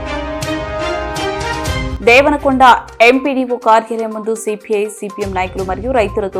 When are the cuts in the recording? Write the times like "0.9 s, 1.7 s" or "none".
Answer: none